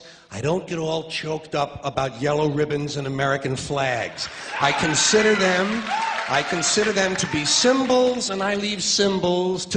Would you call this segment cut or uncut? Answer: uncut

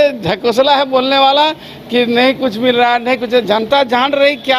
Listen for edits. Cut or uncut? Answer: uncut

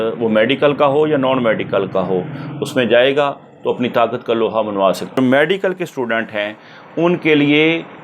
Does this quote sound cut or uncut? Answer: cut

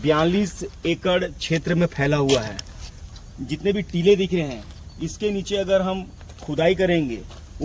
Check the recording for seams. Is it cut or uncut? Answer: cut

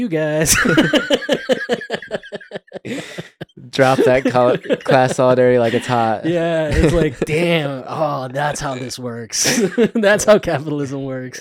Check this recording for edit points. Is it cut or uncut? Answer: uncut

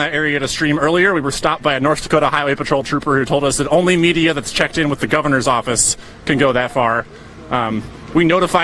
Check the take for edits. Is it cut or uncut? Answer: cut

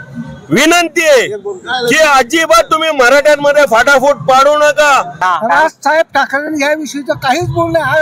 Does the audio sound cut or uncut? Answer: cut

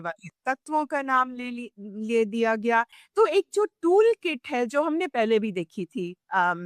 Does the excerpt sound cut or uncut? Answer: cut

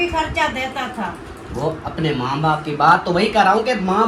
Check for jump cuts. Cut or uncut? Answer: uncut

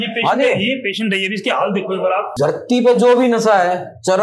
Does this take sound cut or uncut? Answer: cut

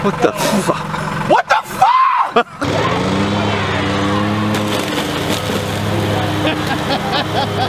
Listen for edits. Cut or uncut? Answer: uncut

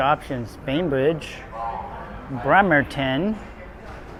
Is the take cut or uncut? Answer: uncut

